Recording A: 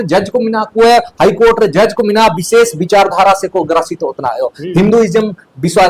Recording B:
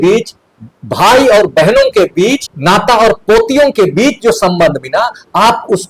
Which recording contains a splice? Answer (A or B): B